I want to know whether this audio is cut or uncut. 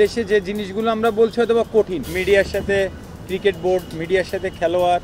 cut